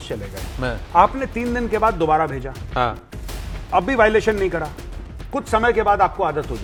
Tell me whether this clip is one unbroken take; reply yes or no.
yes